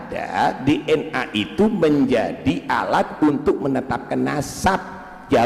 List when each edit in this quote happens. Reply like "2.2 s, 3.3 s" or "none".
none